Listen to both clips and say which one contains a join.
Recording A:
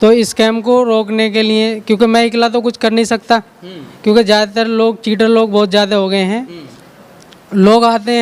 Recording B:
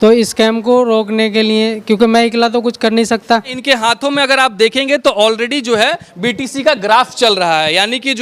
B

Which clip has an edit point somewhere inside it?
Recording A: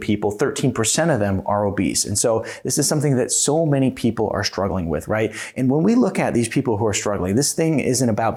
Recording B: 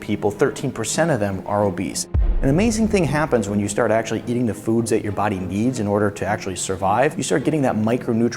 B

